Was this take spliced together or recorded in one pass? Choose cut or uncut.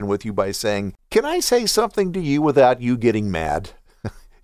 cut